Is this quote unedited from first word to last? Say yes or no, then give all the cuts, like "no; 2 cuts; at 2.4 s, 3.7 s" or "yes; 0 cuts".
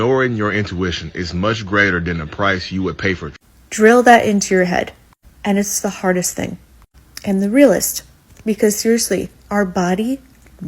yes; 0 cuts